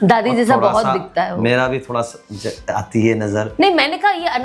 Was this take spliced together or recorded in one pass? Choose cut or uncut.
uncut